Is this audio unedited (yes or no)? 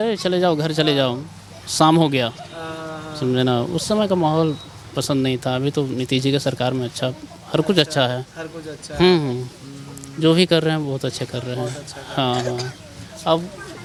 yes